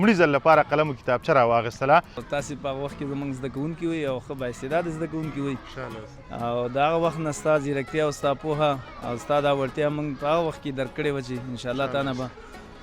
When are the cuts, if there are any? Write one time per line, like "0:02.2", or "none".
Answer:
0:02.2